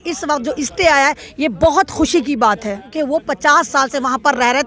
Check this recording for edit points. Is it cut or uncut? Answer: cut